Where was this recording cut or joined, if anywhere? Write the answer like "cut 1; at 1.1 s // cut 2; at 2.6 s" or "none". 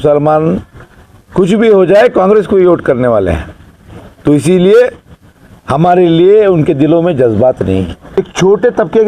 cut 1; at 8.0 s